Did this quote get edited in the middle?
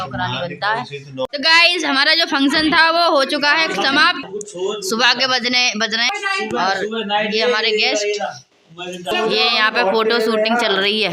yes; 4 cuts; at 1.3 s, 4.2 s, 6.1 s, 9.1 s

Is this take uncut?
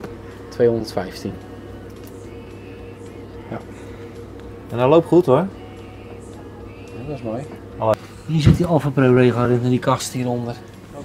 no; 1 cut; at 7.9 s

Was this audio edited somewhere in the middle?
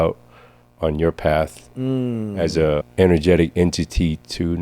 yes; 1 cut; at 2.9 s

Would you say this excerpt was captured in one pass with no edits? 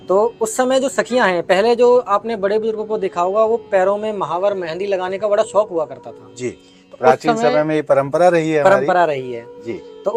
yes; 0 cuts

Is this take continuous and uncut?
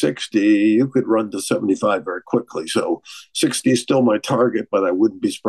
yes; 0 cuts

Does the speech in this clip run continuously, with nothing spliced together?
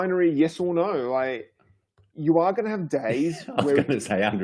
yes; 0 cuts

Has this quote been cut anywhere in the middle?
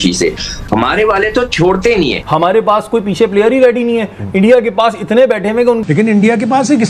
yes; 2 cuts; at 2.3 s, 5.8 s

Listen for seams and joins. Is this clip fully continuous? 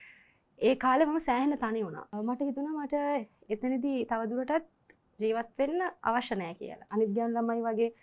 no; 2 cuts; at 2.2 s, 6.9 s

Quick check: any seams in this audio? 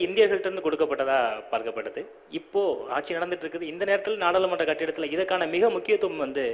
no; 0 cuts

